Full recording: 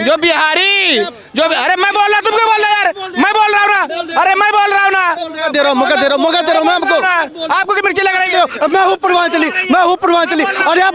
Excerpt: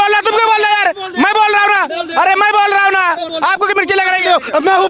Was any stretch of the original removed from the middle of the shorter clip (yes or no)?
yes